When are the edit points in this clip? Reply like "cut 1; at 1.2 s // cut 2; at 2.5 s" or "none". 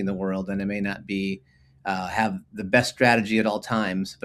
none